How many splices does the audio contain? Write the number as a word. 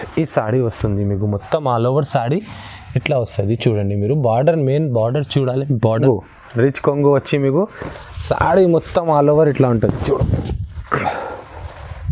one